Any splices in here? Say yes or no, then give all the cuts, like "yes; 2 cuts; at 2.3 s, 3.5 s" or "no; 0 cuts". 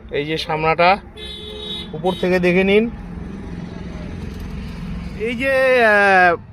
yes; 1 cut; at 5.3 s